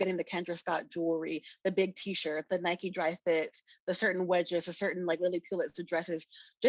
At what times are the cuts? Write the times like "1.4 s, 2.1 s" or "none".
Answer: none